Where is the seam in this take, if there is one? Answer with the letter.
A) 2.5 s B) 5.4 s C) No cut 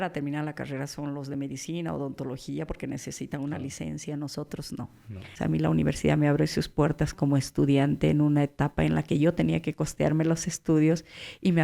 B